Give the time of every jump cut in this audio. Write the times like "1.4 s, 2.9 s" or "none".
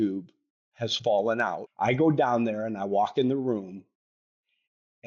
1.7 s